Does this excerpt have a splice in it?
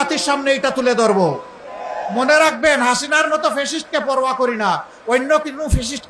no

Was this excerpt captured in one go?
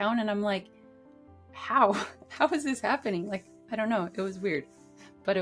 yes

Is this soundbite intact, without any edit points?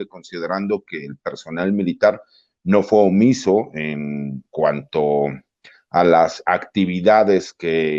yes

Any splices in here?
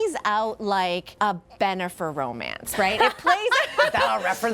yes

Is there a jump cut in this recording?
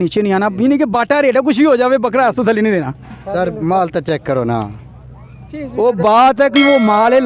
no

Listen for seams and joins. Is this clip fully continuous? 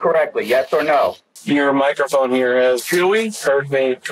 no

